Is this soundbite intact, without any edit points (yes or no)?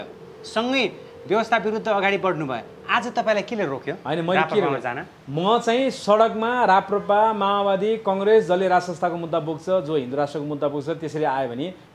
yes